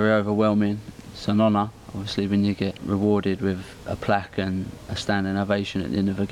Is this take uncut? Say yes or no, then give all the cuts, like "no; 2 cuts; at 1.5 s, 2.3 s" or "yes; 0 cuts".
no; 2 cuts; at 1.0 s, 2.8 s